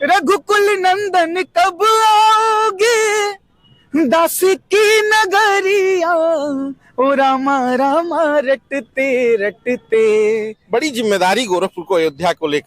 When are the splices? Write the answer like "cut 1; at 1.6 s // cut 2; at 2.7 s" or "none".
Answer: cut 1; at 10.6 s

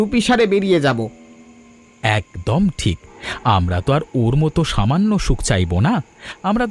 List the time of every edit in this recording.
none

